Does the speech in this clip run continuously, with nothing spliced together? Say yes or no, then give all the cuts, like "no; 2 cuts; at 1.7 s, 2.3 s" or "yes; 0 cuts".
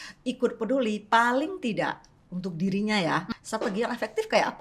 no; 1 cut; at 3.3 s